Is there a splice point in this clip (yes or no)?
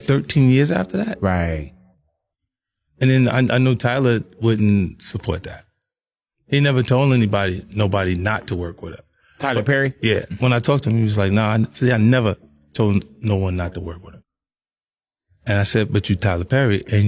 no